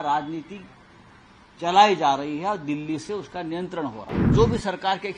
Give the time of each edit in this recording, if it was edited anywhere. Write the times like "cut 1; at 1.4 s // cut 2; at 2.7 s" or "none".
cut 1; at 4.3 s